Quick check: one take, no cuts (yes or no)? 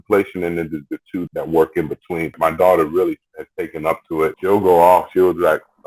no